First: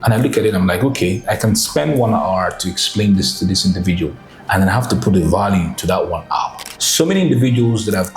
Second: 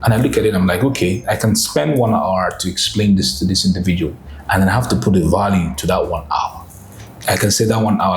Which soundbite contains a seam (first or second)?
first